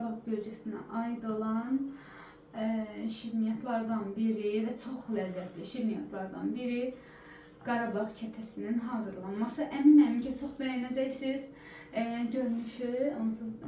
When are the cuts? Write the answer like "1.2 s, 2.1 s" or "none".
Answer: none